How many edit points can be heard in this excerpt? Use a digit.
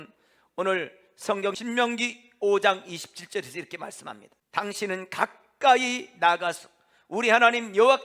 2